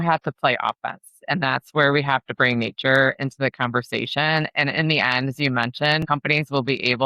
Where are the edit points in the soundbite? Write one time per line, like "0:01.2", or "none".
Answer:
0:06.0